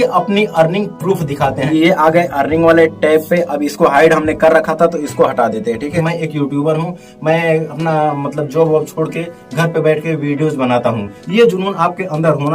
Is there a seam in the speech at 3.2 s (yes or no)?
no